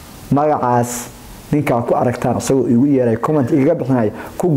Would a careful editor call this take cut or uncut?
uncut